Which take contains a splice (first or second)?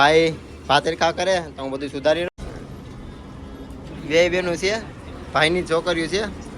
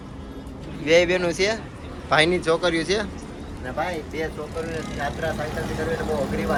first